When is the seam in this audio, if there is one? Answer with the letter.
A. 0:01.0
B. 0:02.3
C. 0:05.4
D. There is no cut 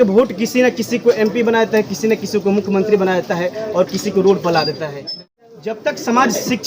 C